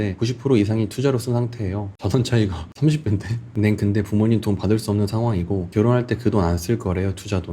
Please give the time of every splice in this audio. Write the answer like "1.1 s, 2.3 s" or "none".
1.8 s